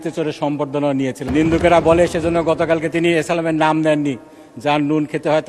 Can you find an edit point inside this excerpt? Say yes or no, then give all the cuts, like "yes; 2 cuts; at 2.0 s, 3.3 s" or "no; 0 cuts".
yes; 1 cut; at 1.2 s